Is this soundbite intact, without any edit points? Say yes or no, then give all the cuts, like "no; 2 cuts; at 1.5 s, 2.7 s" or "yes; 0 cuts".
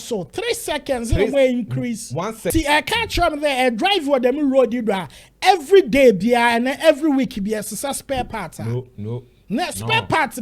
no; 1 cut; at 2.5 s